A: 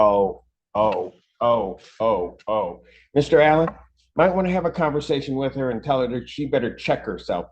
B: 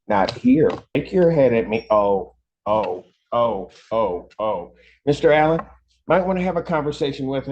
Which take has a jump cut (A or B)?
B